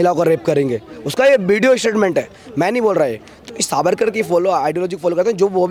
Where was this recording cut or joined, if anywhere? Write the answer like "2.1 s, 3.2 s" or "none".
none